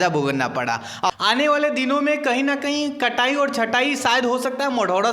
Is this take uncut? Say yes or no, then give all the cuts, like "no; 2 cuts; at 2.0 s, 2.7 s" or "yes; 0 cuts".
no; 1 cut; at 1.1 s